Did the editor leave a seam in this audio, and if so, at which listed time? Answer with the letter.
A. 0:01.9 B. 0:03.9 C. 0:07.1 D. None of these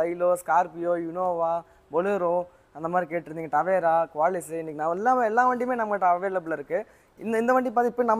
D